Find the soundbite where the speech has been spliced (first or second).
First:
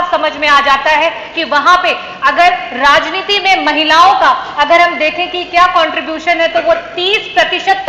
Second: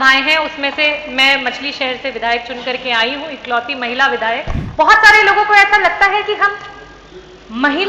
second